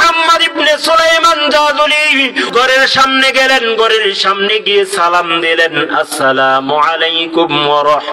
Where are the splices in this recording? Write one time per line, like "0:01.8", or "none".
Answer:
0:02.4